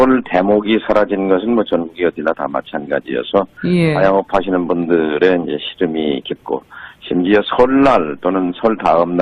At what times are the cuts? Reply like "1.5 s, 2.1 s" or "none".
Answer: 7.5 s